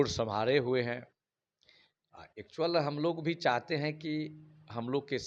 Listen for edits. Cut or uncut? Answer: uncut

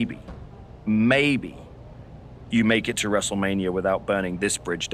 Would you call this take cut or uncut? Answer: uncut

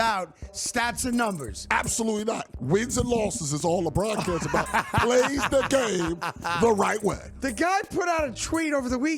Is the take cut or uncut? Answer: cut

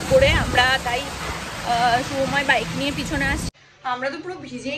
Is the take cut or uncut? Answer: cut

